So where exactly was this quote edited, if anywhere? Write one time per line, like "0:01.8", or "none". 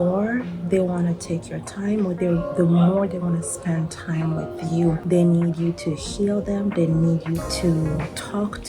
0:07.5